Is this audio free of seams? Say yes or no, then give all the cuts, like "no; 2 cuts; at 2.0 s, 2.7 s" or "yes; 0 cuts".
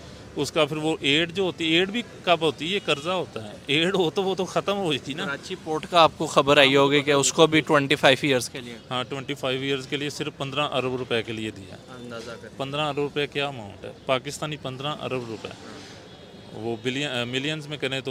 yes; 0 cuts